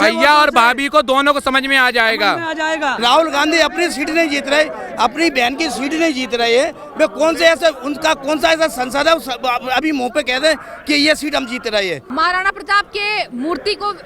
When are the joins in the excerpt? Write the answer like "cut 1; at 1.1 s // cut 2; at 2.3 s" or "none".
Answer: cut 1; at 3.0 s // cut 2; at 12.0 s